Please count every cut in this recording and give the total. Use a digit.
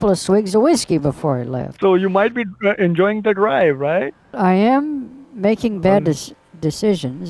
2